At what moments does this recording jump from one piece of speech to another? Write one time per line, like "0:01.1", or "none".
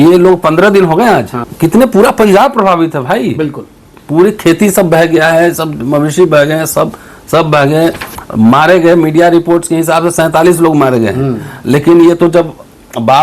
0:01.4